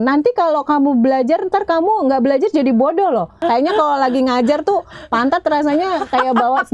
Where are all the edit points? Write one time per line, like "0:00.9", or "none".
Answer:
0:03.3